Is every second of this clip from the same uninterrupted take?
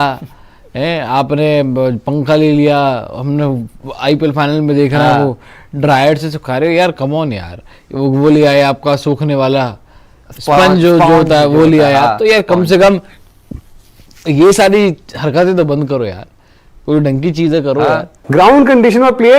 no; 1 cut; at 18.1 s

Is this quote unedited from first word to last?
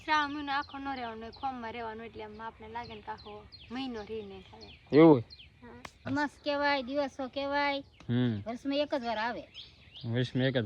no; 1 cut; at 6.0 s

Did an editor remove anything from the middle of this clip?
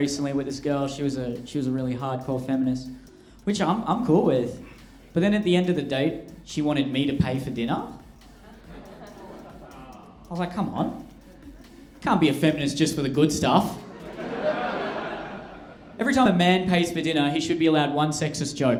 no; 0 cuts

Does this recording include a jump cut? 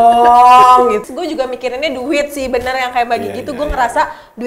yes; 1 cut; at 1.0 s

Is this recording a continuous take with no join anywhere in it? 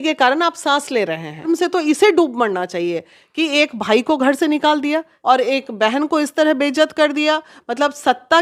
no; 2 cuts; at 1.5 s, 5.1 s

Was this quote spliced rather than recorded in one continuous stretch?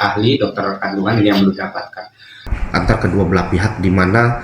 yes; 1 cut; at 2.5 s

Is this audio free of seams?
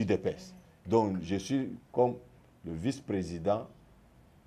yes; 0 cuts

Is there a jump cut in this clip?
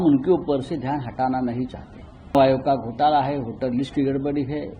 yes; 1 cut; at 2.3 s

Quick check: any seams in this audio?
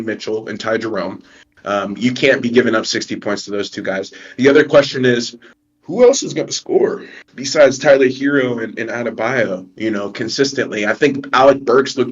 no; 0 cuts

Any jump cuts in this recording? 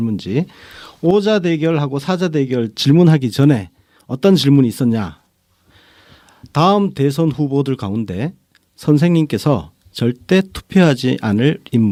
no; 0 cuts

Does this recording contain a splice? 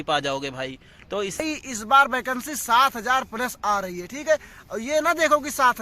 yes; 1 cut; at 1.4 s

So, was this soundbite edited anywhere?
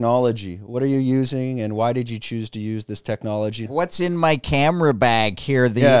yes; 1 cut; at 3.7 s

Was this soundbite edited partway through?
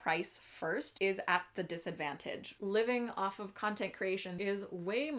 yes; 3 cuts; at 0.9 s, 2.5 s, 4.3 s

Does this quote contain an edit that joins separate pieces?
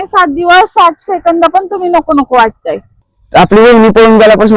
yes; 1 cut; at 3.4 s

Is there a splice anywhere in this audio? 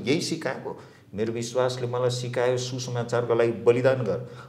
no; 0 cuts

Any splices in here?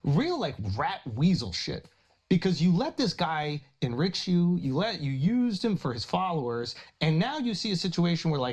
yes; 1 cut; at 2.6 s

